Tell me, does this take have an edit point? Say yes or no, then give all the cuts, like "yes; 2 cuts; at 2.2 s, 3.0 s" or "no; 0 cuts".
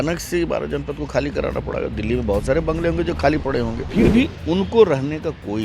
yes; 1 cut; at 3.8 s